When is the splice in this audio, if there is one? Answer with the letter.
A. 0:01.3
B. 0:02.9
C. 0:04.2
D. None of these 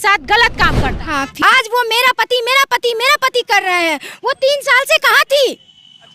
A